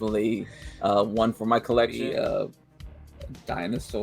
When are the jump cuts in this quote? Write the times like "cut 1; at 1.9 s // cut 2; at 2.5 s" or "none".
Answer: cut 1; at 2.0 s